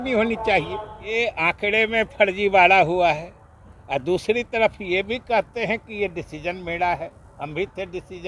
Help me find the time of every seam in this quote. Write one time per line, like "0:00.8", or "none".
0:01.2